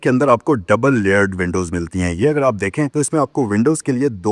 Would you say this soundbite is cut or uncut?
uncut